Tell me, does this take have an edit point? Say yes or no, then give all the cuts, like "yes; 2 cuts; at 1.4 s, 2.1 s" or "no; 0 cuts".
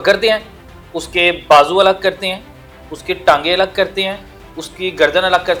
no; 0 cuts